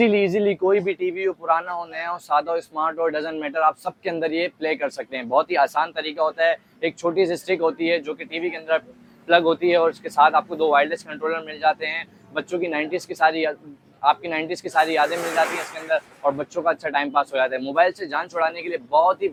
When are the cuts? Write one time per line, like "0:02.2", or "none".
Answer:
none